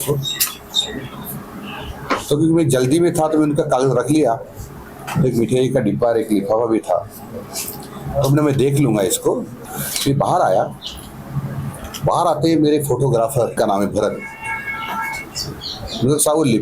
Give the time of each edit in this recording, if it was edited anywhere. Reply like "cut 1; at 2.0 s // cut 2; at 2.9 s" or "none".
cut 1; at 9.6 s // cut 2; at 13.6 s